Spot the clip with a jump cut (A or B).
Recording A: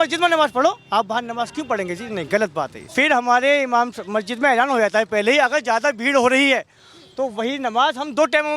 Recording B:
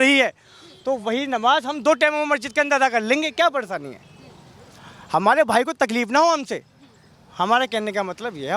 A